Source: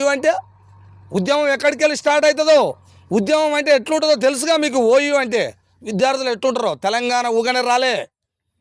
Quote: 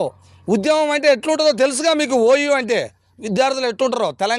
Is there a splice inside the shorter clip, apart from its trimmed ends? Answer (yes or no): no